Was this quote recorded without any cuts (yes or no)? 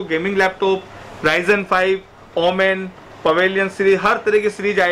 yes